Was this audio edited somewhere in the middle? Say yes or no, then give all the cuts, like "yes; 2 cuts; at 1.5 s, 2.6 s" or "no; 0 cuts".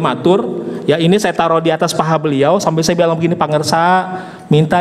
no; 0 cuts